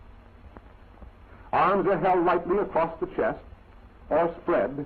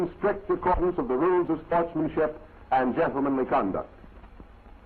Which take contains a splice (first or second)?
second